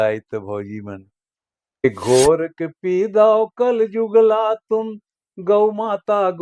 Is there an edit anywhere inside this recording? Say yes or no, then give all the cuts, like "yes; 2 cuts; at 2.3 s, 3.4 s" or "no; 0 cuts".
yes; 1 cut; at 1.8 s